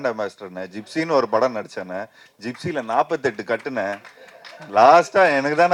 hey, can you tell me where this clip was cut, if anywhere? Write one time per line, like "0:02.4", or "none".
none